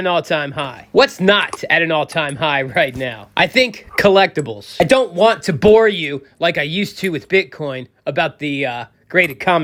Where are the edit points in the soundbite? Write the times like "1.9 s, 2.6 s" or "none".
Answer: none